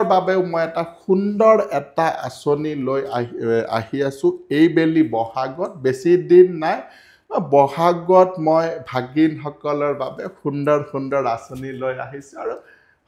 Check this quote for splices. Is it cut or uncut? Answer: uncut